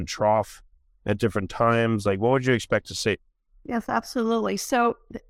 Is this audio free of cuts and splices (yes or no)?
yes